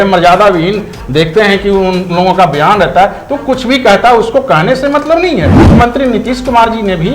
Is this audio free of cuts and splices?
no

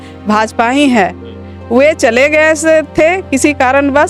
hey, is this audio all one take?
yes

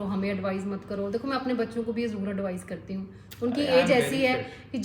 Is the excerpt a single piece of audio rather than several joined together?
yes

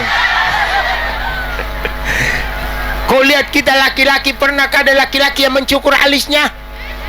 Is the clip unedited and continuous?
yes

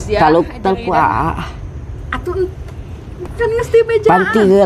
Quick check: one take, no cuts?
yes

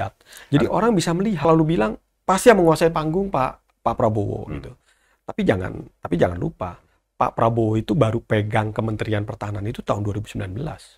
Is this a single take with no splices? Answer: no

